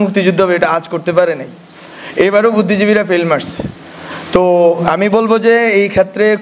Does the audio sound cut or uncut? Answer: uncut